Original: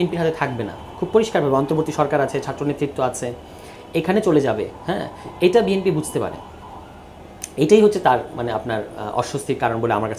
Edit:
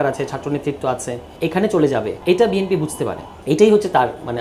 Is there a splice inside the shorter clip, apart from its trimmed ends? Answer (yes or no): yes